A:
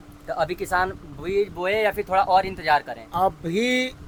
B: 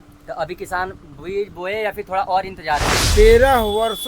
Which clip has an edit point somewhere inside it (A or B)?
B